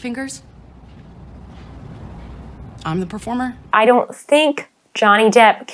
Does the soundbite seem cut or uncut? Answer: cut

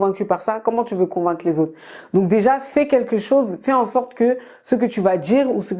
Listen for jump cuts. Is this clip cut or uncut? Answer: uncut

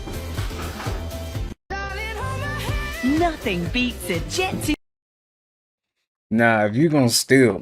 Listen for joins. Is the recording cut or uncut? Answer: uncut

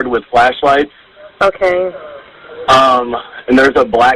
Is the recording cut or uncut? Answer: uncut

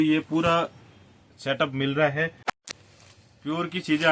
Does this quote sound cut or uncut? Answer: cut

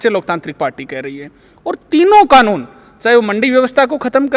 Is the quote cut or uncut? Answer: uncut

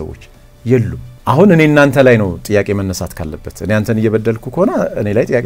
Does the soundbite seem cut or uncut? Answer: cut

